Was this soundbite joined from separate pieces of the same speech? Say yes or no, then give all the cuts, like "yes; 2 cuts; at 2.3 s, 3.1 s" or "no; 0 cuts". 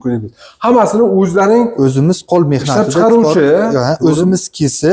no; 0 cuts